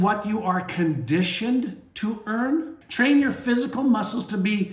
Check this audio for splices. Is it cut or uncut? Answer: cut